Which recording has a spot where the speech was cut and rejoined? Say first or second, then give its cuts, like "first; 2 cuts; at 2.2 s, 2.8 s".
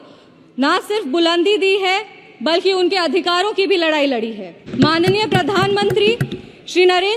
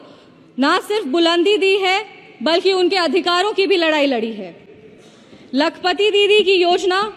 first; 1 cut; at 4.7 s